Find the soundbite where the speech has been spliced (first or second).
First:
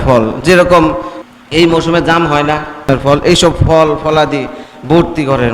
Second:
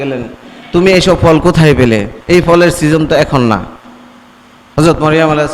first